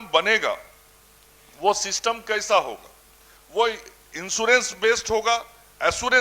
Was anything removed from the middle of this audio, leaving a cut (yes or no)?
no